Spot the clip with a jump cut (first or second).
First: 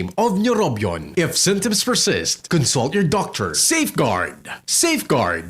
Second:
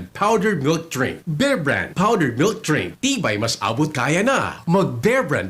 first